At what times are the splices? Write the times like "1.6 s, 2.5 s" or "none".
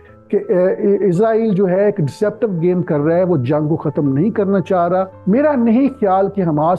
5.2 s